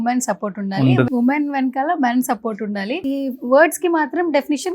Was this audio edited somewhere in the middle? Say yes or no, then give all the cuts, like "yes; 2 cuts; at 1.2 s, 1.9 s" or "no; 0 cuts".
yes; 2 cuts; at 1.1 s, 3.0 s